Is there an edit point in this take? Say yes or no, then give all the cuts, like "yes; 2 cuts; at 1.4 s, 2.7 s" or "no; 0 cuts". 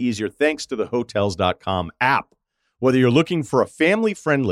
no; 0 cuts